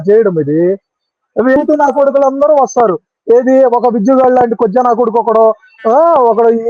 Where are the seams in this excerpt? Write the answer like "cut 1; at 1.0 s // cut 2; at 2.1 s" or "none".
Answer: cut 1; at 1.6 s